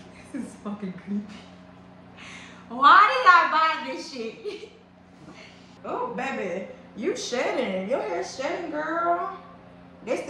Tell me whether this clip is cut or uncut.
cut